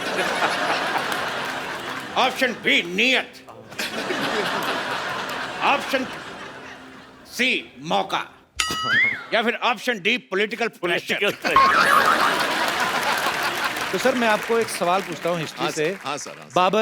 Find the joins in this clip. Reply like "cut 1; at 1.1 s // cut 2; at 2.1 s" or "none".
cut 1; at 13.9 s